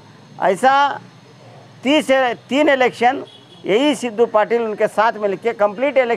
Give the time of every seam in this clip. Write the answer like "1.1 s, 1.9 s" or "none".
none